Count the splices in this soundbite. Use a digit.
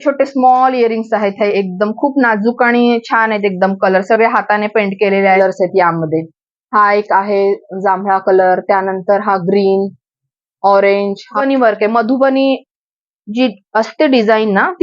2